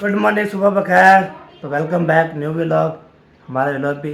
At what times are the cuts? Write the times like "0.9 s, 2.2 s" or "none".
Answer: none